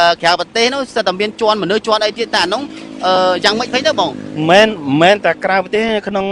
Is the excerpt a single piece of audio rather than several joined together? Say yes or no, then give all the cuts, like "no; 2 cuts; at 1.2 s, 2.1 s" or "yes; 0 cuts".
yes; 0 cuts